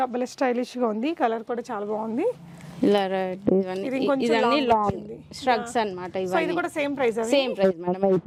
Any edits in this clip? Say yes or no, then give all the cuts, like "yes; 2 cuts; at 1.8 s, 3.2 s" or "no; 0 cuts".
no; 0 cuts